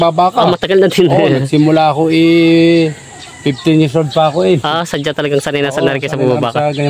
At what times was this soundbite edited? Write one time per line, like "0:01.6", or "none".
none